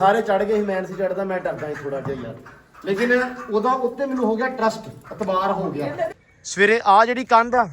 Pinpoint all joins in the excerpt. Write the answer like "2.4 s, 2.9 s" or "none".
6.1 s